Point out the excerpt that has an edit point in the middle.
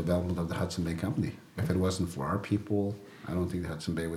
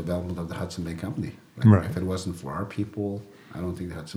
first; 1 cut; at 1.6 s

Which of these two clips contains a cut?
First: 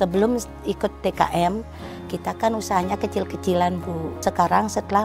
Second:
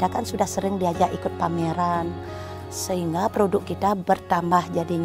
first; 1 cut; at 4.1 s

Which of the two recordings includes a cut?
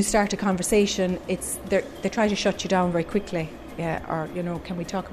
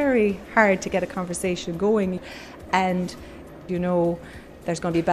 second; 2 cuts; at 2.2 s, 3.6 s

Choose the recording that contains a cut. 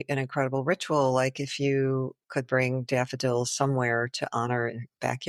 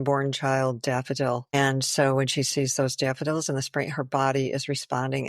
second; 1 cut; at 1.5 s

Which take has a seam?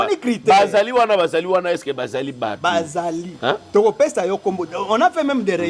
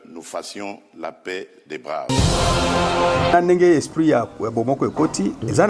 second; 2 cuts; at 2.1 s, 3.3 s

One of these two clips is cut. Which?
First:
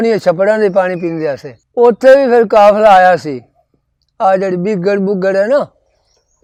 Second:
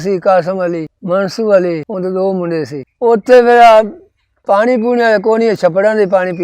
second; 1 cut; at 2.9 s

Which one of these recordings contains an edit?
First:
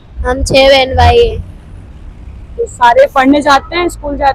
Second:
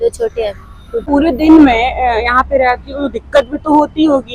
second; 1 cut; at 1.0 s

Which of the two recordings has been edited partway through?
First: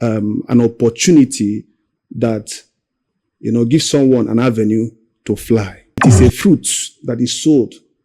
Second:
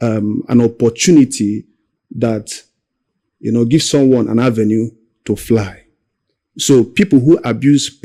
first; 1 cut; at 6.0 s

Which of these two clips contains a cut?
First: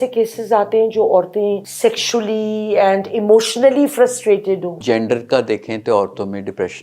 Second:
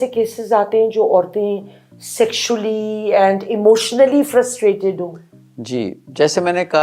first; 2 cuts; at 1.7 s, 4.8 s

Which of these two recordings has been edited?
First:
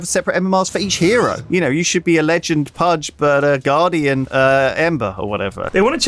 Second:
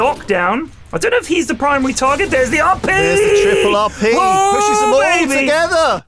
first; 4 cuts; at 1.4 s, 3.1 s, 4.3 s, 5.1 s

